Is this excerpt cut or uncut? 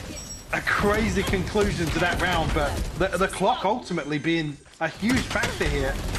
uncut